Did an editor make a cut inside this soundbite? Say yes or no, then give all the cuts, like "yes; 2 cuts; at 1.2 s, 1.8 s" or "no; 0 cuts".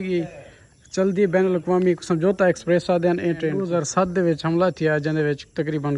yes; 1 cut; at 3.6 s